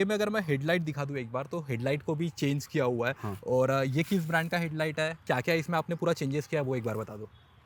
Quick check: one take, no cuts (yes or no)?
yes